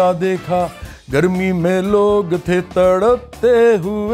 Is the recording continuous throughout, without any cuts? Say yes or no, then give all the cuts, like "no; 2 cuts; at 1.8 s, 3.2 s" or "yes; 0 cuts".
yes; 0 cuts